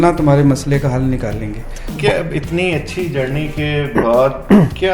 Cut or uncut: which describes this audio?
cut